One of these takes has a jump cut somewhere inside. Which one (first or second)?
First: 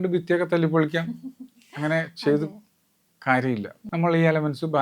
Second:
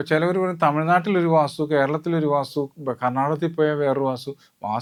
first